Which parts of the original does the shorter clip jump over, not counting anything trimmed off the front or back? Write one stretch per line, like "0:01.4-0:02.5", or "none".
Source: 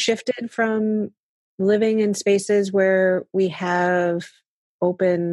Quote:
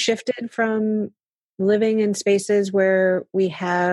none